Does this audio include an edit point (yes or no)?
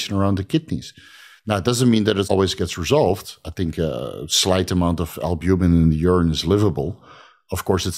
yes